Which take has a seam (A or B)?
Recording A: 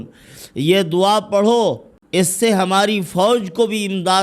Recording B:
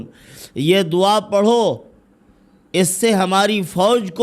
A